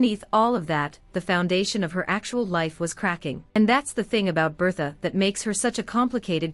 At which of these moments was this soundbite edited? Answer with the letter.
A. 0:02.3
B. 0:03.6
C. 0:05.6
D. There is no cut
B